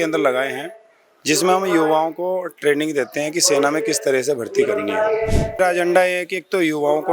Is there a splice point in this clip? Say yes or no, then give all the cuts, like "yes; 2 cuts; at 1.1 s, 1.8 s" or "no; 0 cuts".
yes; 1 cut; at 5.6 s